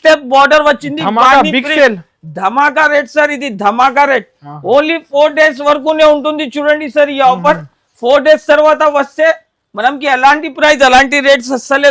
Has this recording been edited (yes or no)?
no